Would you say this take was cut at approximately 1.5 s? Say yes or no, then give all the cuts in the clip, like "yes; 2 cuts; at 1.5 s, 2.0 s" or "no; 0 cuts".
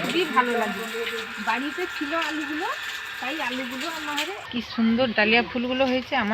no; 1 cut; at 4.4 s